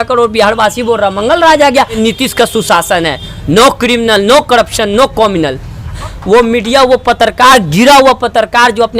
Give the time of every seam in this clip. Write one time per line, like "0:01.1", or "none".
0:02.0
0:06.1